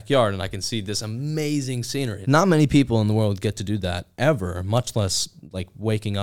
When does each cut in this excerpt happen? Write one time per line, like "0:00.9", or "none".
0:02.2